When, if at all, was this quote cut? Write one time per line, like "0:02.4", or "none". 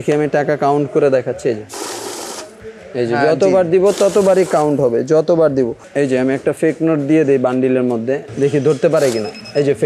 0:05.8
0:08.3